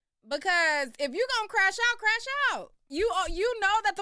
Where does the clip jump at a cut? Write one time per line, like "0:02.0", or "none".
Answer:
0:02.8